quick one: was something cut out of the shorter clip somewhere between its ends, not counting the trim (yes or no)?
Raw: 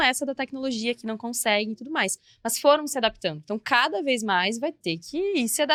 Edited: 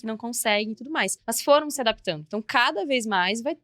yes